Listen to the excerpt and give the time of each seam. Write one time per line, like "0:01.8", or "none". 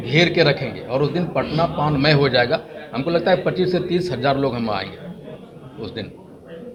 none